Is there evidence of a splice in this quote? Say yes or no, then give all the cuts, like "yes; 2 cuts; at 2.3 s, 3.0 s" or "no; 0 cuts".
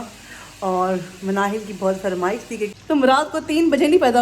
yes; 1 cut; at 2.8 s